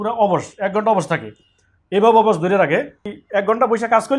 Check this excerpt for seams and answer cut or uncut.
cut